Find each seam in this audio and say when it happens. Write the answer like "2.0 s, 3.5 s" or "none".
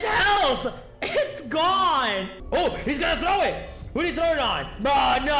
2.3 s